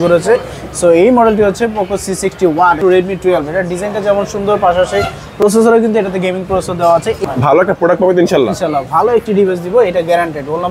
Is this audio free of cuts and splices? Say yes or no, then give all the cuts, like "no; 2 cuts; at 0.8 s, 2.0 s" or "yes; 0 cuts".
no; 2 cuts; at 2.8 s, 7.2 s